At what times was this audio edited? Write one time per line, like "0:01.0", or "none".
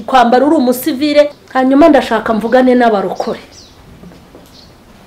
0:01.4

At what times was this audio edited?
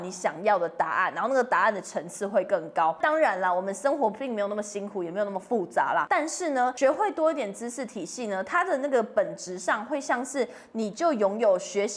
0:03.0
0:06.4

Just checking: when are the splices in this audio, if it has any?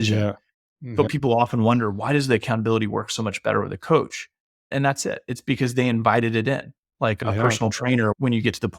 0:01.1

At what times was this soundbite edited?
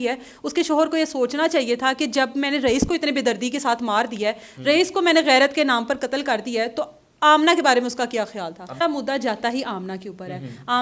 0:08.8

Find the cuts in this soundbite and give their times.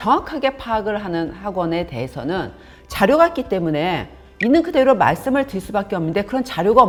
none

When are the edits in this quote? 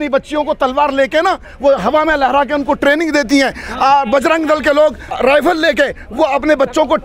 0:05.2

